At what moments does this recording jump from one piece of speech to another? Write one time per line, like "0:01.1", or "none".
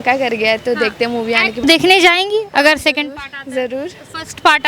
0:01.6